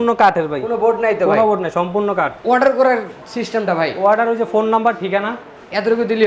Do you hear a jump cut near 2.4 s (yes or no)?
yes